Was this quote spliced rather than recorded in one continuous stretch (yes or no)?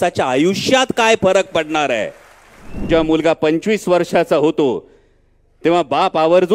yes